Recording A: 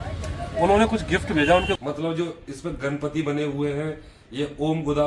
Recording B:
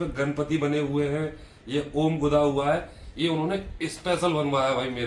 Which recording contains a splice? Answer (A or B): A